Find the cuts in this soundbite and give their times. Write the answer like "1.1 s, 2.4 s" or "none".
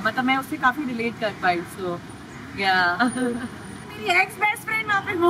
3.9 s